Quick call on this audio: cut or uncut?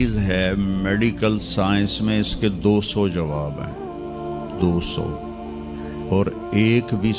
uncut